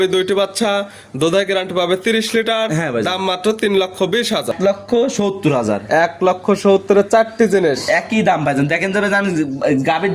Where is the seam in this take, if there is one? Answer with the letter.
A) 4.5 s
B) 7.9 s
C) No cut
A